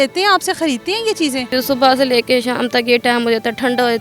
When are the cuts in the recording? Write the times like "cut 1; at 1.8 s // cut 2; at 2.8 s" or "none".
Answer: cut 1; at 1.5 s